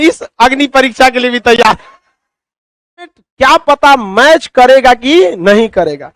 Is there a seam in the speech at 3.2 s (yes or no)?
yes